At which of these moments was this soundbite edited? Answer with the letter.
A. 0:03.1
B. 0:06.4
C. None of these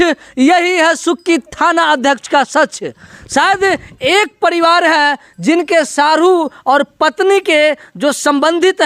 C